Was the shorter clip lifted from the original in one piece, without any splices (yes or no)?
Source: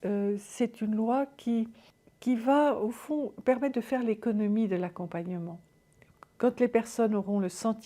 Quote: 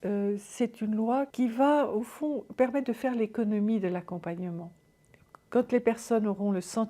no